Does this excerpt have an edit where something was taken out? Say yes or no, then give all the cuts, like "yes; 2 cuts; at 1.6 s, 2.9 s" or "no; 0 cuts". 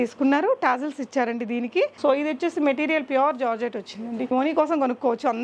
yes; 2 cuts; at 1.9 s, 4.3 s